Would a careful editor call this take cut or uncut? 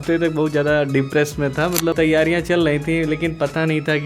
cut